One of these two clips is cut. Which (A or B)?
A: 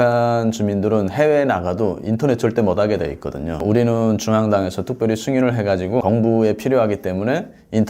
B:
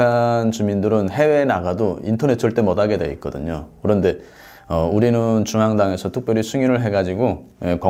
A